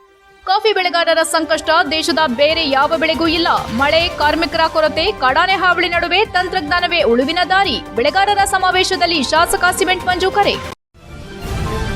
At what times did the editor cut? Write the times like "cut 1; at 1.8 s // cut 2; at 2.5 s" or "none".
cut 1; at 10.8 s